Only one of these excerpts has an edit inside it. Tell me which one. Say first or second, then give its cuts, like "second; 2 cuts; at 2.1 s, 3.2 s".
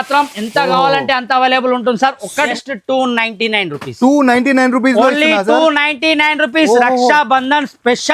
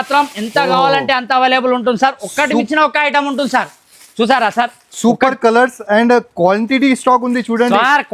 first; 1 cut; at 2.5 s